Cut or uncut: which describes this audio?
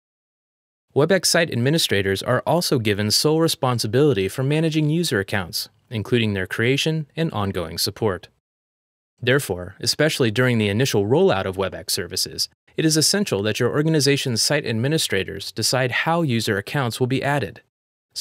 cut